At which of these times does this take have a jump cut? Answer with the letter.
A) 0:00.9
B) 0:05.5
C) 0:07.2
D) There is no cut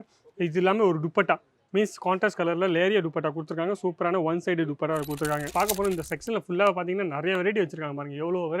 B